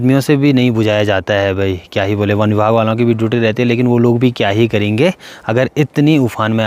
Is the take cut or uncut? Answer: uncut